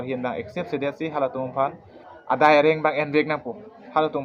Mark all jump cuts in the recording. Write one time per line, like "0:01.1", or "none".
none